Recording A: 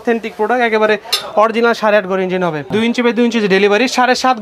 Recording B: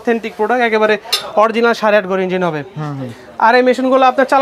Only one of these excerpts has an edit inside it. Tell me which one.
A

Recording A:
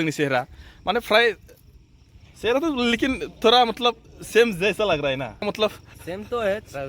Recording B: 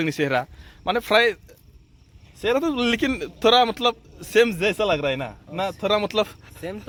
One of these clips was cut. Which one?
A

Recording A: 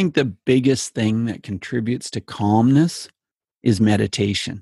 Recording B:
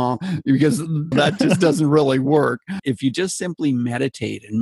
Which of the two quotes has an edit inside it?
B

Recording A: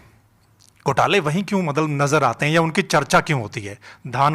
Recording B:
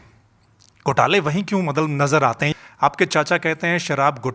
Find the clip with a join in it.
B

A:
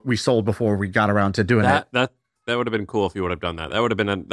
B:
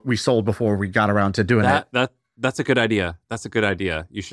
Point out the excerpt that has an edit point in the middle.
A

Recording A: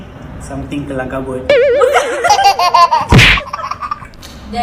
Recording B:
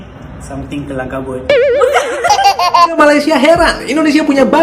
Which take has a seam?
B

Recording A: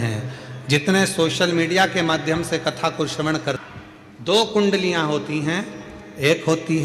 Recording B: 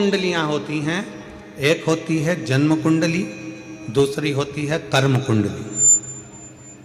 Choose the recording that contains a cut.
A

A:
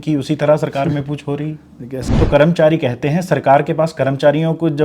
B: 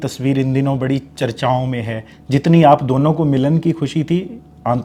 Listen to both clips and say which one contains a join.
A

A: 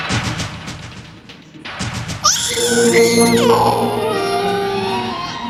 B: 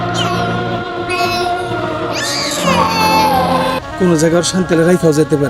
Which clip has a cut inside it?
B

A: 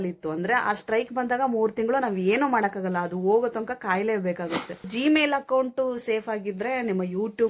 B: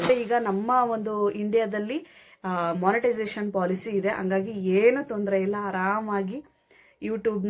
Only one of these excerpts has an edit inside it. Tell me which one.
A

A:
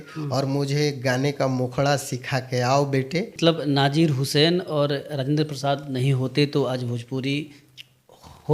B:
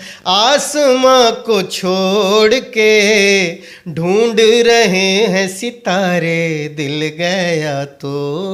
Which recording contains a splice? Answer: A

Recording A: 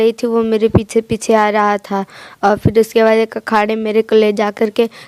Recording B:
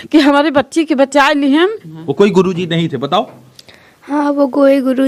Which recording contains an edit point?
B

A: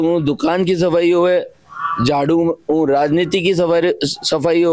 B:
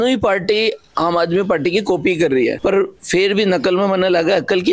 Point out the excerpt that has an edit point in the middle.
B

